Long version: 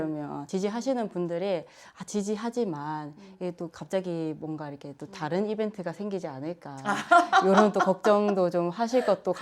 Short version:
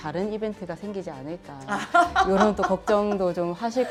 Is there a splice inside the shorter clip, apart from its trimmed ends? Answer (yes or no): no